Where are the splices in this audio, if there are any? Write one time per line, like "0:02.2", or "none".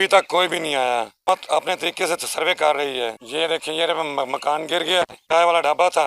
0:03.2
0:05.2